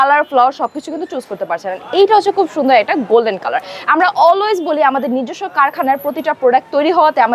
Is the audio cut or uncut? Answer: uncut